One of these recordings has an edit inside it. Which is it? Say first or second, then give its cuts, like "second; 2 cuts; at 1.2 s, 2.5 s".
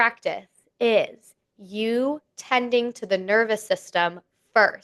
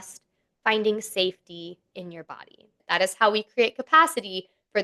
second; 1 cut; at 2.7 s